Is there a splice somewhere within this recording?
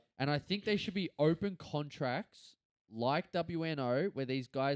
no; 0 cuts

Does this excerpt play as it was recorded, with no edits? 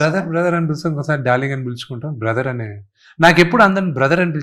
yes; 0 cuts

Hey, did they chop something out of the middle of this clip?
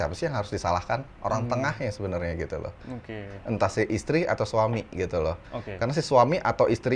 no; 0 cuts

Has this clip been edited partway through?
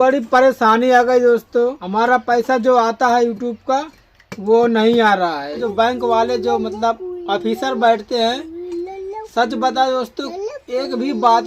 yes; 2 cuts; at 1.8 s, 5.6 s

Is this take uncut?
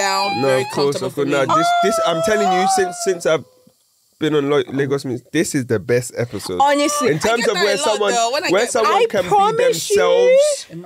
yes; 0 cuts

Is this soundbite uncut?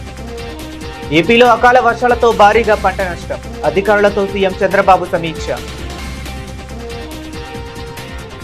yes; 0 cuts

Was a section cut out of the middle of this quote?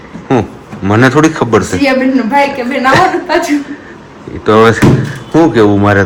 no; 0 cuts

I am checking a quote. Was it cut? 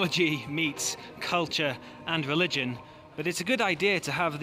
no; 0 cuts

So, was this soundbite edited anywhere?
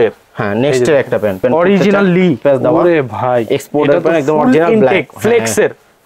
yes; 2 cuts; at 1.4 s, 2.4 s

